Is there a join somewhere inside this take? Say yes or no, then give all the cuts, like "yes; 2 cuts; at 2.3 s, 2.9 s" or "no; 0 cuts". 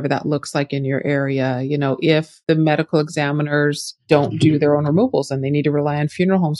yes; 1 cut; at 2.3 s